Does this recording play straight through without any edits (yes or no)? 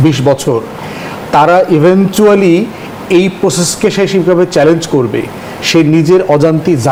yes